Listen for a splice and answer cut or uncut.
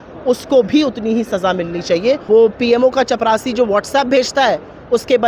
cut